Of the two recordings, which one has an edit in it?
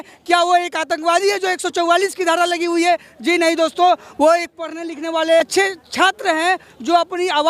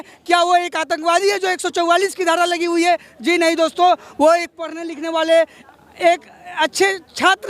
first; 1 cut; at 5.4 s

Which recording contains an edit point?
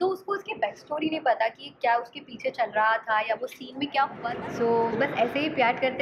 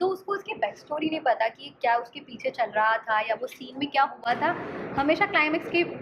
first; 1 cut; at 4.2 s

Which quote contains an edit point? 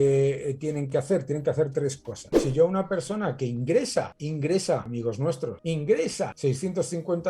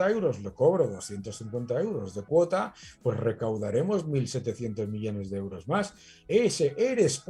first; 3 cuts; at 2.4 s, 5.2 s, 6.3 s

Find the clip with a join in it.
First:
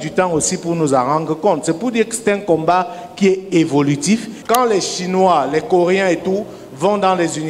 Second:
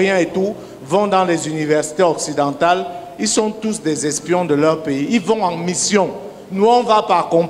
first; 1 cut; at 4.3 s

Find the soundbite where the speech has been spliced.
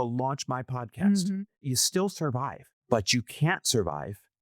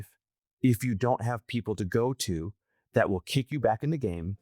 first; 2 cuts; at 1.6 s, 2.7 s

